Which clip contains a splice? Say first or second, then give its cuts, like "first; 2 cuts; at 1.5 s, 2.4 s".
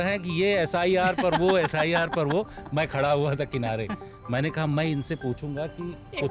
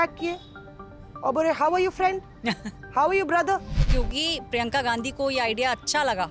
second; 1 cut; at 3.8 s